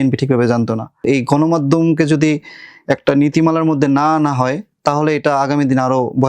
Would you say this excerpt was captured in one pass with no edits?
no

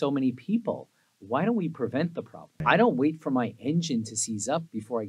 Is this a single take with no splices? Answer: no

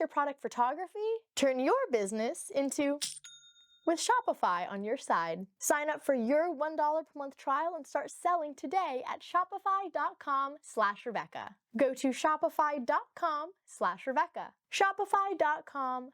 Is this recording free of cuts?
no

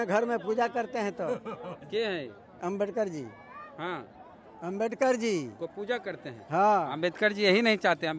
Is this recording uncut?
yes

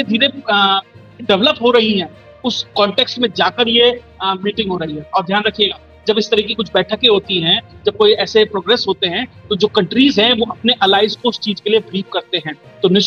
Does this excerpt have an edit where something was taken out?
no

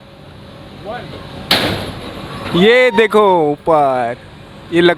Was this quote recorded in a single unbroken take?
yes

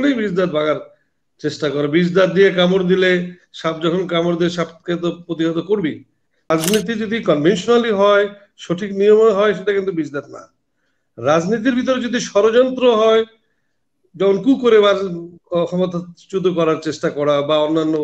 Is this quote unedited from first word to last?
no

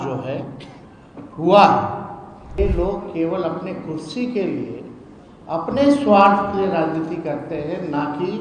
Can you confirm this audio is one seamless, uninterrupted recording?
no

